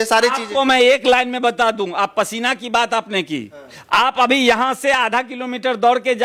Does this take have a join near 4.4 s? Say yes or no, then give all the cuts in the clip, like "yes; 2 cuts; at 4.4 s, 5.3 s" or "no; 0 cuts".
no; 0 cuts